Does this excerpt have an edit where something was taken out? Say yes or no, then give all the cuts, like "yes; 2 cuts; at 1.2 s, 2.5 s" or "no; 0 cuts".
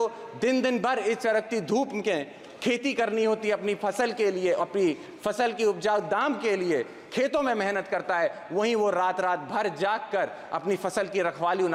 no; 0 cuts